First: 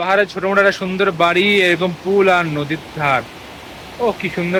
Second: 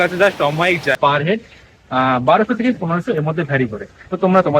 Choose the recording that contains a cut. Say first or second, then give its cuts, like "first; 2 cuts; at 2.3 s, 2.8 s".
second; 1 cut; at 1.0 s